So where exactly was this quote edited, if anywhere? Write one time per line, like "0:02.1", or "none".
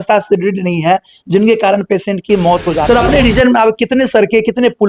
0:02.9